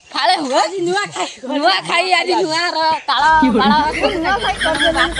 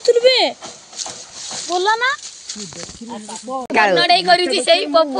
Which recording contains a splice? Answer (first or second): second